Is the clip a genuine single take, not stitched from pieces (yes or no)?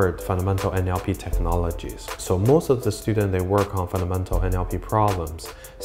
no